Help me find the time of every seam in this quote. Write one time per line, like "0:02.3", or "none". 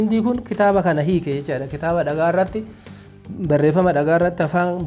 none